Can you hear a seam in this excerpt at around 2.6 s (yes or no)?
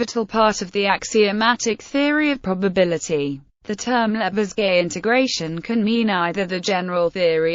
yes